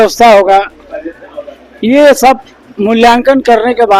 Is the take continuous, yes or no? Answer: yes